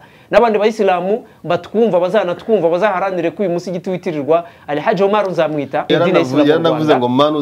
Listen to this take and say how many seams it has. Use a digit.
1